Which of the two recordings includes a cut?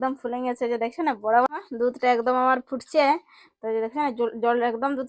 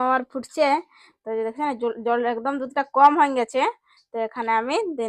first; 1 cut; at 1.5 s

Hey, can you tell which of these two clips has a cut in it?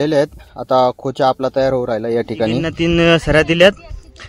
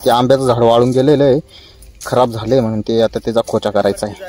first; 1 cut; at 2.7 s

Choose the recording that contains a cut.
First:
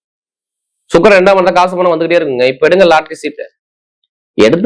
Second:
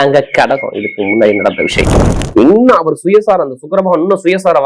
second; 1 cut; at 2.2 s

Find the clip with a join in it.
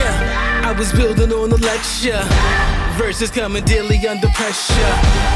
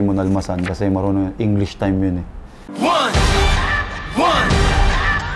second; 1 cut; at 2.3 s

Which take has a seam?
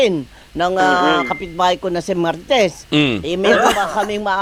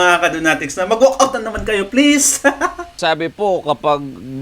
second; 1 cut; at 3.0 s

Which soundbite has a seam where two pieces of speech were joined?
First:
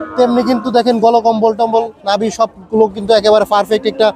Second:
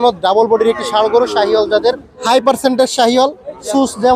second; 1 cut; at 2.1 s

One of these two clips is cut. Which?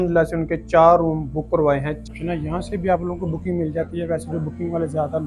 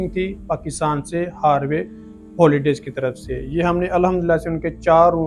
first; 1 cut; at 2.1 s

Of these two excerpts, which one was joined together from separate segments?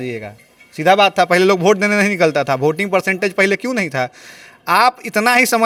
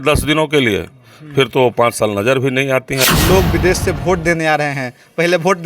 second; 1 cut; at 3.0 s

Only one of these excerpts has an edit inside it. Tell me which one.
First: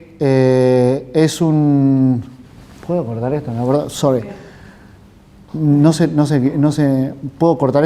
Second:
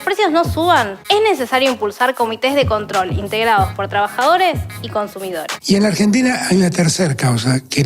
second; 1 cut; at 5.5 s

